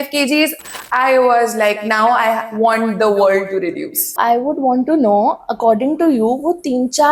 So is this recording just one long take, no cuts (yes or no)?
no